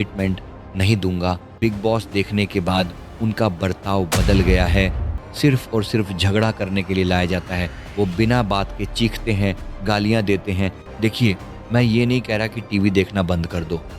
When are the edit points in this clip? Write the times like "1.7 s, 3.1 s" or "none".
1.5 s, 5.1 s, 10.8 s